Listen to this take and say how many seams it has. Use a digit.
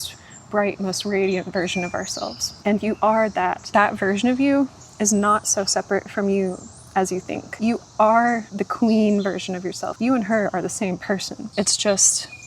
6